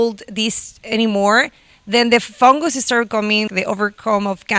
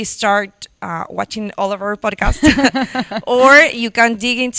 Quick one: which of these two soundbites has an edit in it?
first; 1 cut; at 3.5 s

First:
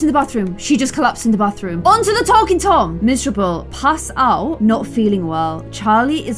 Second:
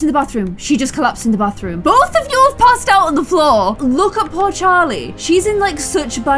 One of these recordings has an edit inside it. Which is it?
second; 2 cuts; at 1.8 s, 3.8 s

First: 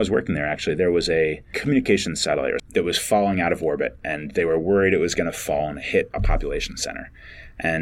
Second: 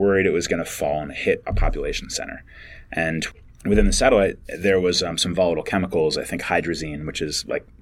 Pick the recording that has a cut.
first; 2 cuts; at 1.5 s, 2.6 s

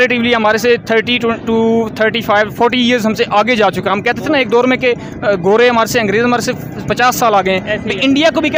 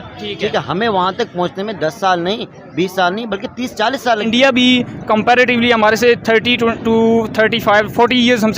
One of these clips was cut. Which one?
second; 1 cut; at 4.2 s

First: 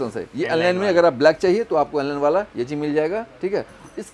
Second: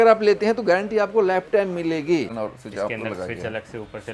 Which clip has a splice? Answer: second; 1 cut; at 2.3 s

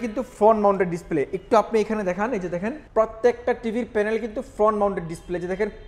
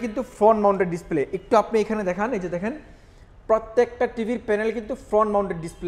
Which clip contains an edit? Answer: first; 1 cut; at 2.8 s

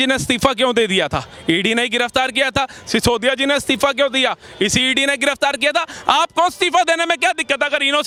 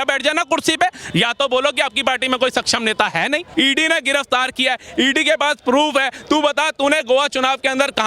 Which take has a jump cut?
second; 1 cut; at 3.5 s

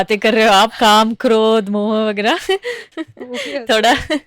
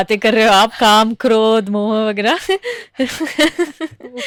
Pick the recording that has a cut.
first; 1 cut; at 2.9 s

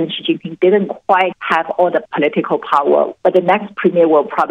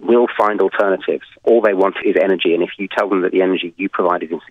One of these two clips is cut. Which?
first; 2 cuts; at 1.4 s, 3.1 s

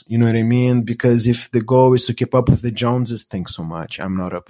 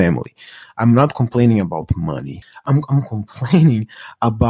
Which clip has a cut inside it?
second; 1 cut; at 2.6 s

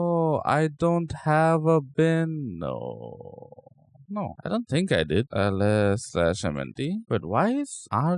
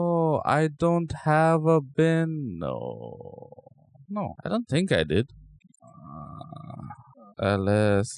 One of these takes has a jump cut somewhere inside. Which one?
first; 1 cut; at 5.3 s

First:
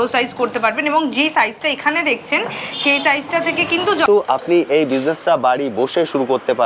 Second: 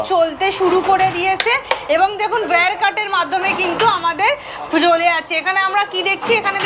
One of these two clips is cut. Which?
first; 1 cut; at 4.1 s

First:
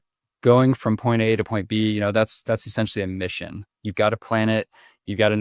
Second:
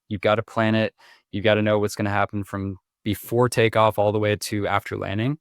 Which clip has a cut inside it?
second; 1 cut; at 2.9 s

